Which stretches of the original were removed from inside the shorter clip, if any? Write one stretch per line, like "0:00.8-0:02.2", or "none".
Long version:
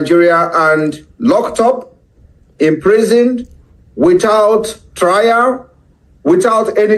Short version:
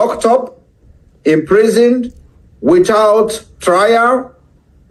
none